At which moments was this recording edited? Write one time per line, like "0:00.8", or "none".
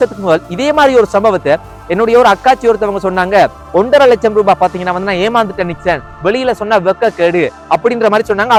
none